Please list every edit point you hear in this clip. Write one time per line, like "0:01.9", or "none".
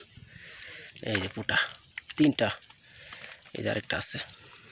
none